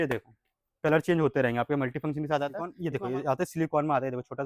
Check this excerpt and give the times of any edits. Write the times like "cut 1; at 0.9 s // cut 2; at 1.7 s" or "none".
cut 1; at 2.8 s